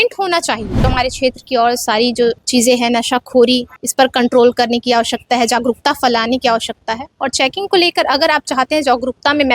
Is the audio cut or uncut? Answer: cut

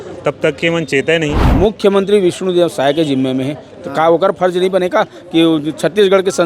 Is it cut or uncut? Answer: cut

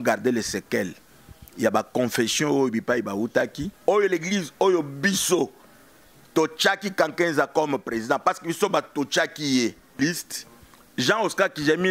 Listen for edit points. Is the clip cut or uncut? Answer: cut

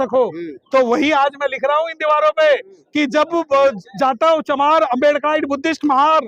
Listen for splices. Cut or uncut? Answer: uncut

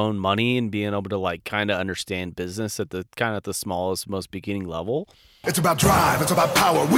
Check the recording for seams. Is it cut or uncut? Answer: cut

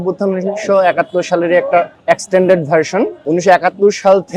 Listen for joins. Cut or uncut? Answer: uncut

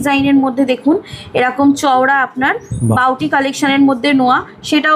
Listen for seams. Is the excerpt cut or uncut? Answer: uncut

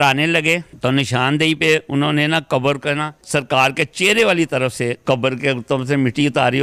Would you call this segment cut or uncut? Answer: uncut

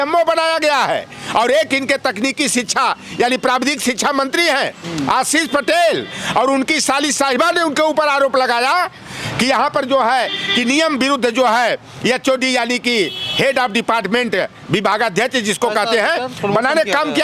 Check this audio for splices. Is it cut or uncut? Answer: uncut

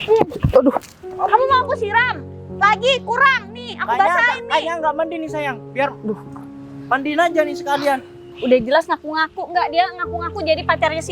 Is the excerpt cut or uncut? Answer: cut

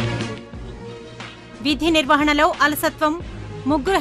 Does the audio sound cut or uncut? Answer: uncut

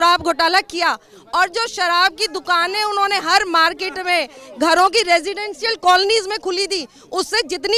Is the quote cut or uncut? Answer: uncut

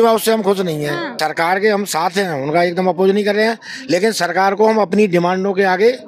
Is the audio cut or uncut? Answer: cut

